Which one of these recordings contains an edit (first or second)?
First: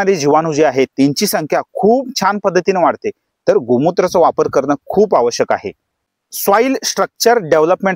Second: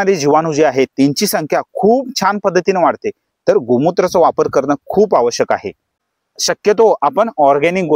second